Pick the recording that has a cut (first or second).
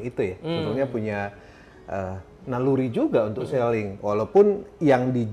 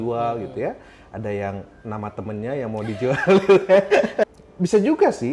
second